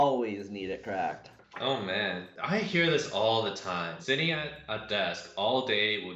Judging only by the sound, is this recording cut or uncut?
cut